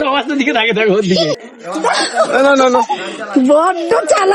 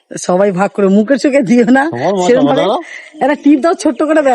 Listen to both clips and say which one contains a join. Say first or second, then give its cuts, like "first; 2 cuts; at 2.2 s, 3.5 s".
first; 1 cut; at 1.3 s